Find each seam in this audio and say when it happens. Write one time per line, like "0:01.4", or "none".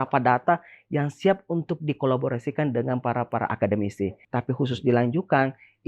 0:04.2